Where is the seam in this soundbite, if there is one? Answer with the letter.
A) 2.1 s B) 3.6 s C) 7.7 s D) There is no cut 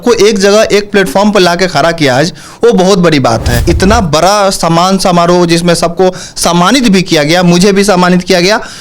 B